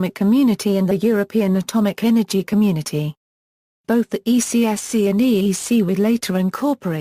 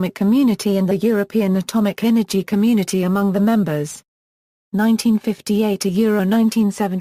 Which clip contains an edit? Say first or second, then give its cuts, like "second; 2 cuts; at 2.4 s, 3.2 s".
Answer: first; 1 cut; at 2.3 s